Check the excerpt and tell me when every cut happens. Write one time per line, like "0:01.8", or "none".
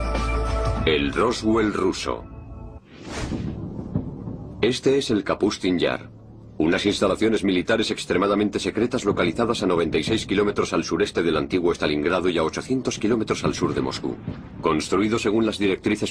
0:02.0